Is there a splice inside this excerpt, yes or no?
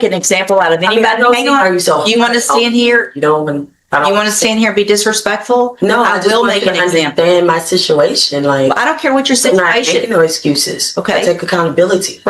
no